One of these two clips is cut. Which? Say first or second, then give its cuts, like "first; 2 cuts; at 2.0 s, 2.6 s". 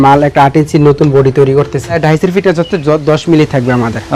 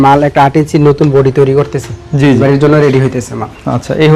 first; 1 cut; at 2.0 s